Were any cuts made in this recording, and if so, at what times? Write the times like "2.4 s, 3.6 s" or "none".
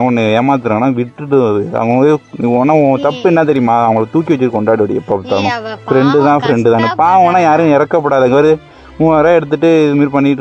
none